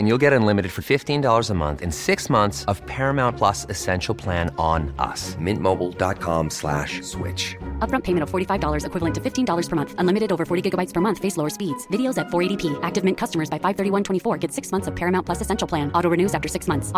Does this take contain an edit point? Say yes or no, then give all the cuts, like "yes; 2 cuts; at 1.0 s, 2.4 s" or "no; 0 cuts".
no; 0 cuts